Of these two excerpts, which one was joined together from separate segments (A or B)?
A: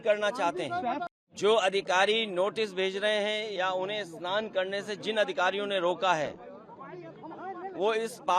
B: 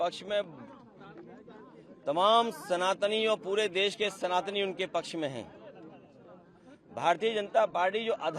A